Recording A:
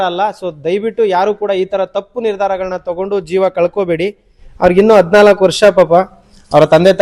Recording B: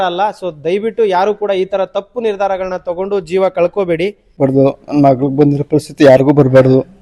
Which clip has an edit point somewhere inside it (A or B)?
B